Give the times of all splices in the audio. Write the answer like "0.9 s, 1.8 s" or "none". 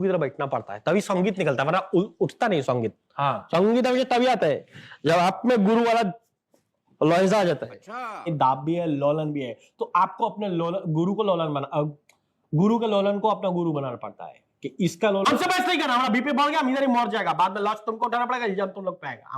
8.3 s, 15.3 s